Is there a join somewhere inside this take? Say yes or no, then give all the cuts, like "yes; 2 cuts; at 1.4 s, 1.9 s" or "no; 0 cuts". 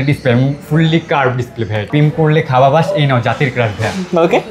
yes; 1 cut; at 1.8 s